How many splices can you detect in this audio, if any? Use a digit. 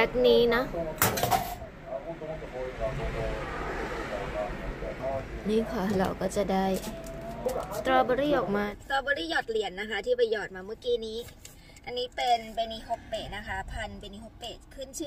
1